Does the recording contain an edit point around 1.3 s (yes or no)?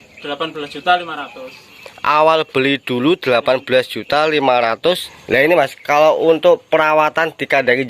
no